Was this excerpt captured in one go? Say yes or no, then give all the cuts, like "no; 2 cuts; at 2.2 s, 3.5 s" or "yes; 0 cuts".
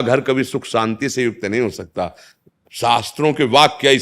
no; 1 cut; at 2.3 s